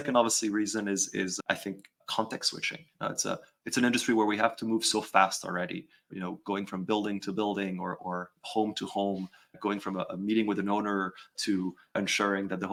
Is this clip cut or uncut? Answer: uncut